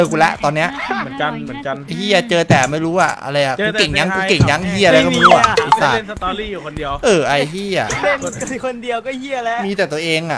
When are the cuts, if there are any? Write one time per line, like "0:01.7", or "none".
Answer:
none